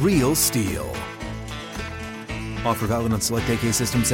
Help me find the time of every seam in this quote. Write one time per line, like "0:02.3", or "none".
none